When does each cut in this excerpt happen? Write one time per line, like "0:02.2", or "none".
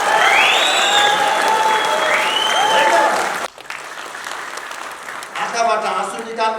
0:03.5